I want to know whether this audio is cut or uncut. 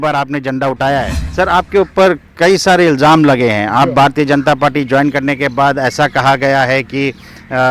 cut